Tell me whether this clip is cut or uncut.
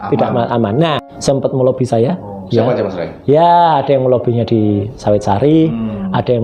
cut